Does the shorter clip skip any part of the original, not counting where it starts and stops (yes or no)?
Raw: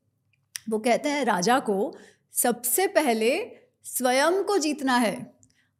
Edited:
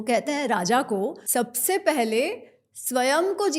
yes